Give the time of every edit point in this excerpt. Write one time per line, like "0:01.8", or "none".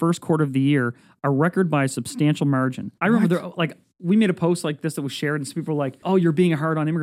0:02.9
0:06.0